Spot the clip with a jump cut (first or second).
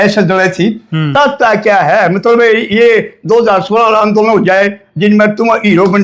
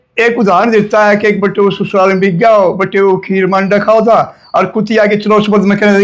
first